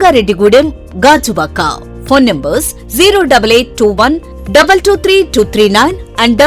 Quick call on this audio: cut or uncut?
uncut